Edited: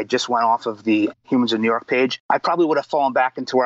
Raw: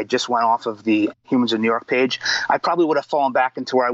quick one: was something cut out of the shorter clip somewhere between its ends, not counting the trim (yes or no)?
yes